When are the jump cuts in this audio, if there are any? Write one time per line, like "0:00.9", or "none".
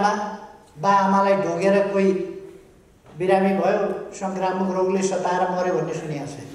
none